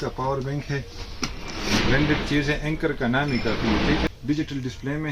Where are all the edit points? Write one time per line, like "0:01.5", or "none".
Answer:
0:04.1